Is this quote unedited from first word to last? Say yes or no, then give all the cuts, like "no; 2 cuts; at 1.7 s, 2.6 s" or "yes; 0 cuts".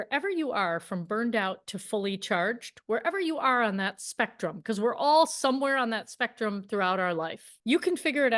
no; 1 cut; at 7.5 s